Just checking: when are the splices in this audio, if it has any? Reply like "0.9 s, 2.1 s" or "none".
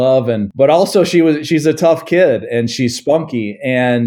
none